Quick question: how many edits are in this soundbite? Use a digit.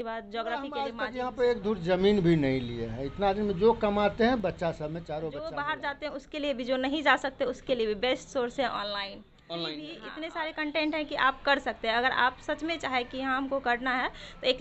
3